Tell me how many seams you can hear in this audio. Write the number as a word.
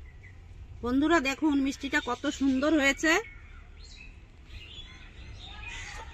zero